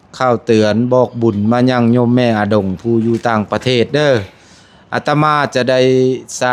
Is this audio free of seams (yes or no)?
yes